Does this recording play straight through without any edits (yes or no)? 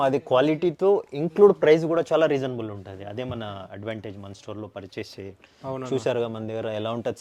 yes